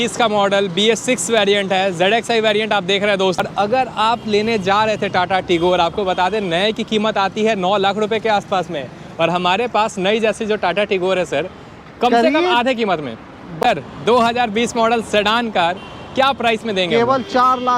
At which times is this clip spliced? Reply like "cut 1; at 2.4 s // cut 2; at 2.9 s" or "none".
cut 1; at 3.4 s // cut 2; at 13.5 s